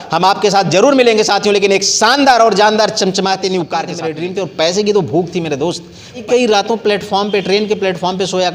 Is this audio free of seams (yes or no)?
no